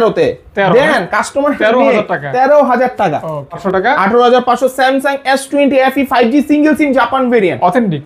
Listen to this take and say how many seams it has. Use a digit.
1